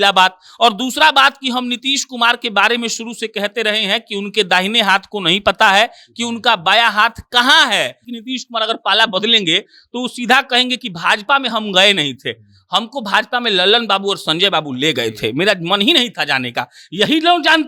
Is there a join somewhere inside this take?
yes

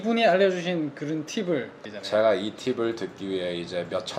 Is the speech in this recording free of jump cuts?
no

